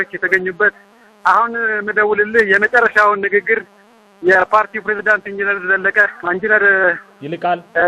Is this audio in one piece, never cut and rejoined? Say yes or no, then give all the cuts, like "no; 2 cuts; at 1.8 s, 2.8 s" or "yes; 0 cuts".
yes; 0 cuts